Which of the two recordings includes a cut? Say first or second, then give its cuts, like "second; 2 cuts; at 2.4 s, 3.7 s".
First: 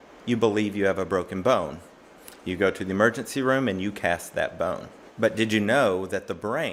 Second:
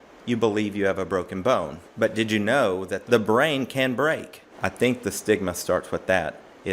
second; 3 cuts; at 1.8 s, 2.9 s, 4.5 s